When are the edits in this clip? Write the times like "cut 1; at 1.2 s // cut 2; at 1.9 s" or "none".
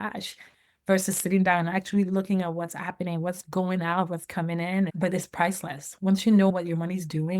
cut 1; at 4.9 s // cut 2; at 6.5 s